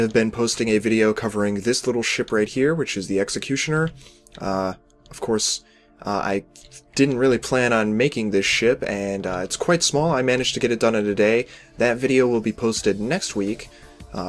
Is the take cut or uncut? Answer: uncut